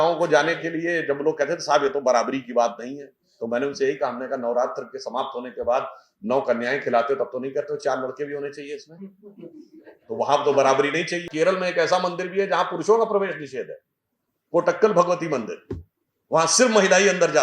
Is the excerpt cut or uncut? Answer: cut